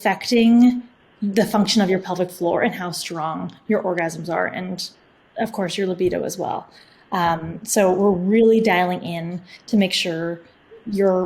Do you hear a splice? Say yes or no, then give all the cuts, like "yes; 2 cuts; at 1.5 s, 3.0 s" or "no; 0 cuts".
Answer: no; 0 cuts